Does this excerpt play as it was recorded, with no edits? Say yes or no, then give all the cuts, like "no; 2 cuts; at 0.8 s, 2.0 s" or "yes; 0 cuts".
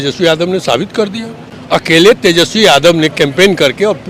no; 1 cut; at 1.4 s